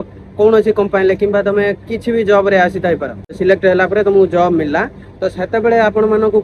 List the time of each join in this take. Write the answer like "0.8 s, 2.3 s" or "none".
3.4 s